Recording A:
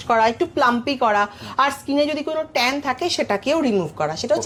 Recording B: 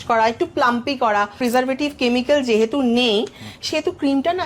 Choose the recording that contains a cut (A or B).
B